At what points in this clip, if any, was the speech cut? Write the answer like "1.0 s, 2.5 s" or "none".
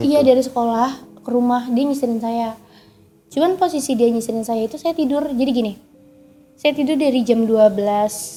none